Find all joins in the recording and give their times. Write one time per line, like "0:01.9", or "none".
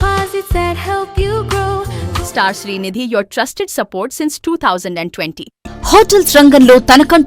0:02.0
0:05.5